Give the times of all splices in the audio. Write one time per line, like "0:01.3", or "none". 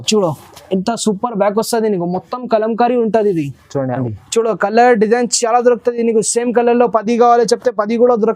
0:04.0